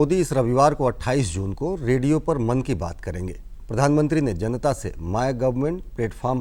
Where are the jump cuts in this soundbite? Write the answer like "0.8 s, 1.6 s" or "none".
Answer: none